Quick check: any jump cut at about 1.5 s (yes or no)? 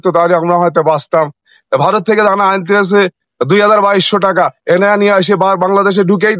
yes